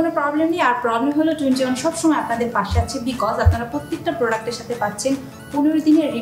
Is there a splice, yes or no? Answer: no